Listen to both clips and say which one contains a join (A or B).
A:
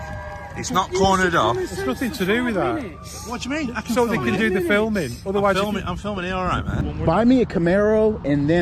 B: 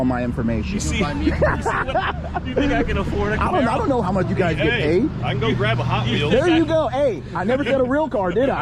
A